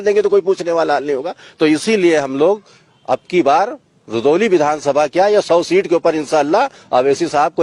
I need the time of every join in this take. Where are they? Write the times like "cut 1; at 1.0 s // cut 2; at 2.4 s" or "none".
none

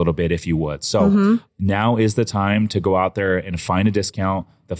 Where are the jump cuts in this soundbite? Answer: cut 1; at 1.5 s

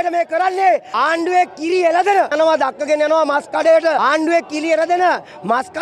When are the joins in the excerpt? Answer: cut 1; at 0.9 s // cut 2; at 2.3 s // cut 3; at 4.0 s

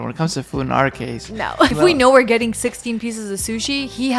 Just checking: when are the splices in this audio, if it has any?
cut 1; at 1.7 s

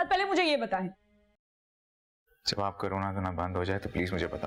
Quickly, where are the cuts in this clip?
none

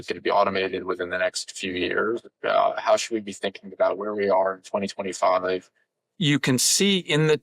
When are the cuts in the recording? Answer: cut 1; at 2.2 s // cut 2; at 5.6 s

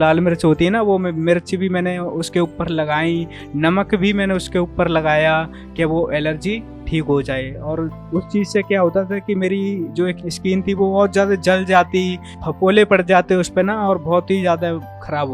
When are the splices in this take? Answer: cut 1; at 8.0 s

